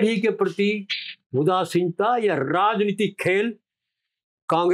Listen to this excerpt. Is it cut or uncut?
uncut